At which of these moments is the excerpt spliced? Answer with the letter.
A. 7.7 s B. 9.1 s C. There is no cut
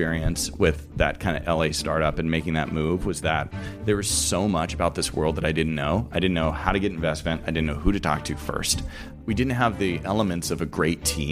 B